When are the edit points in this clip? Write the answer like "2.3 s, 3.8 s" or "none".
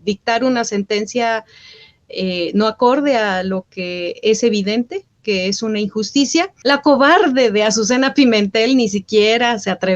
6.5 s

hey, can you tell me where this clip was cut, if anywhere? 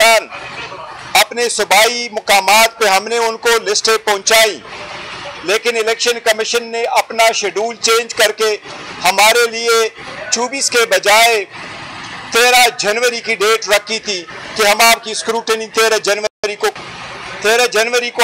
16.4 s

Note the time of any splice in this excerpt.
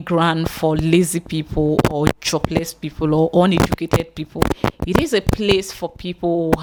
none

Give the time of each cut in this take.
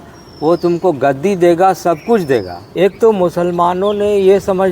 2.6 s

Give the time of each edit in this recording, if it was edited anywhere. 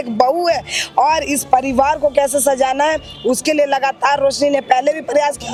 none

